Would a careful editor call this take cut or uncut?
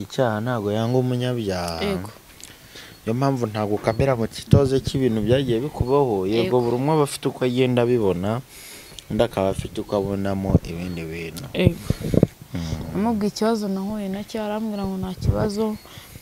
cut